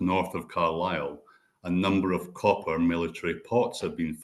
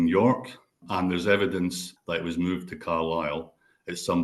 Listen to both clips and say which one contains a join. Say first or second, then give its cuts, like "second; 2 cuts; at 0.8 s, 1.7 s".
second; 2 cuts; at 0.8 s, 1.9 s